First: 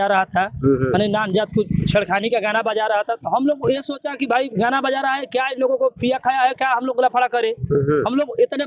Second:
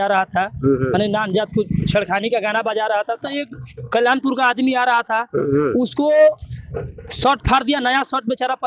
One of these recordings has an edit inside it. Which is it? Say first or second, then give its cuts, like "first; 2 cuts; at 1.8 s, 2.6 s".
second; 1 cut; at 3.2 s